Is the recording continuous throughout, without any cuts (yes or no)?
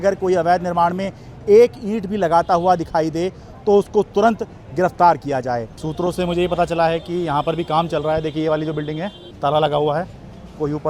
no